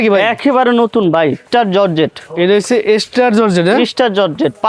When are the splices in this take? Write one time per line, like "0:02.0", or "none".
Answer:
0:01.4